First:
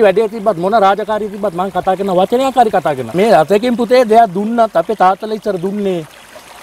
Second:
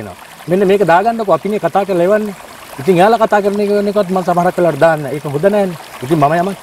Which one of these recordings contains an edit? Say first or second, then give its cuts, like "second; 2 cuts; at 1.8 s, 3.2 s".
first; 1 cut; at 3.2 s